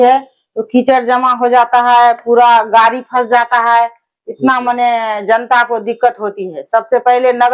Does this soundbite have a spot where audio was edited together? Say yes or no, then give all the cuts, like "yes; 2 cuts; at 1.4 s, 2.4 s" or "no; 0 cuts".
no; 0 cuts